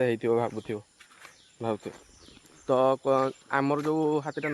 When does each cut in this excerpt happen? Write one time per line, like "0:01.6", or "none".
none